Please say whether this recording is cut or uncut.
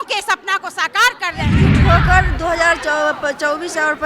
cut